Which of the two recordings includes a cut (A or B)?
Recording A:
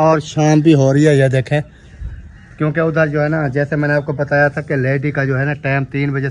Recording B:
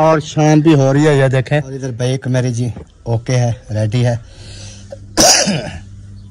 B